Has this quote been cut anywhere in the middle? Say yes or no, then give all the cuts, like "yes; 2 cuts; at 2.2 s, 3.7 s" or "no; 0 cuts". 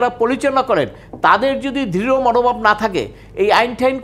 no; 0 cuts